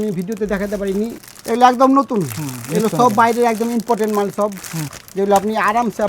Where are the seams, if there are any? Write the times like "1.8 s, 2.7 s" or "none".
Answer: 1.1 s, 5.0 s